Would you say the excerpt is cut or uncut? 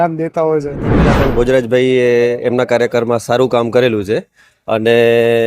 cut